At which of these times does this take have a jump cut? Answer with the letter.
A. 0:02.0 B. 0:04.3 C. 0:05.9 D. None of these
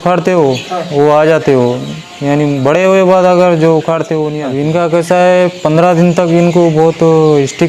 B